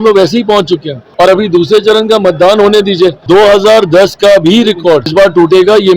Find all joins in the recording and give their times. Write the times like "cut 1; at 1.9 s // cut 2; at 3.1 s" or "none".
cut 1; at 1.0 s // cut 2; at 3.2 s // cut 3; at 5.1 s